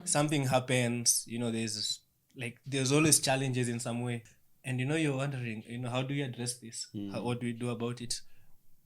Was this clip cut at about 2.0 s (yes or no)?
no